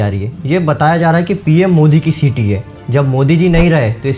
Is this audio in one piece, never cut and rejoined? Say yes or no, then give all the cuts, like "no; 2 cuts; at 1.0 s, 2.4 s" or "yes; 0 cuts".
yes; 0 cuts